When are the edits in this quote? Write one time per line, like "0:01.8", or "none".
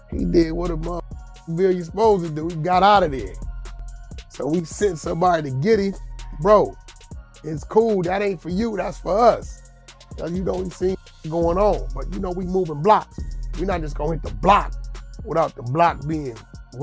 none